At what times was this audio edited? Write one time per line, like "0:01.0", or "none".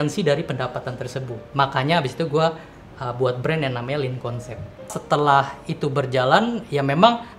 0:01.4
0:04.9